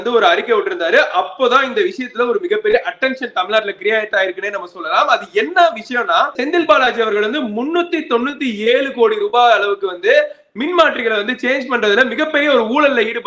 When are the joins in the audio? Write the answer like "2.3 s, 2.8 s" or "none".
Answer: 6.4 s